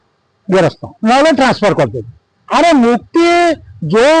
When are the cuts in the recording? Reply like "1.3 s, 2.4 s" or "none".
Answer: 0.9 s, 2.4 s